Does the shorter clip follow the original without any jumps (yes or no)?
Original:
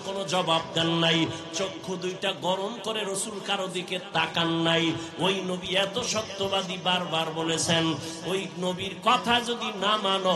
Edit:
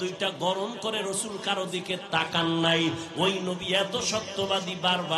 yes